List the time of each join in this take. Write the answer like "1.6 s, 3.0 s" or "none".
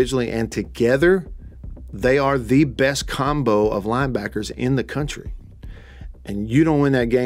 none